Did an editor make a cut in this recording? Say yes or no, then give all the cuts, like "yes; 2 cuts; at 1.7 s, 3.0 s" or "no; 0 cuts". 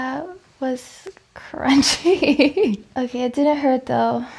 yes; 1 cut; at 2.9 s